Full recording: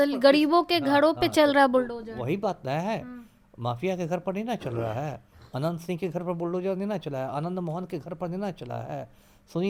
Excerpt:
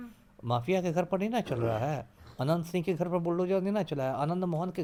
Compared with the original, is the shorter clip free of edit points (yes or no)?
yes